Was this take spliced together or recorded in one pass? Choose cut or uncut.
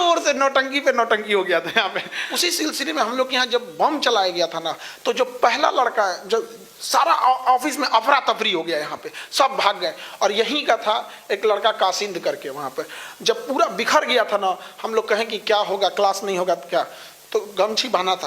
cut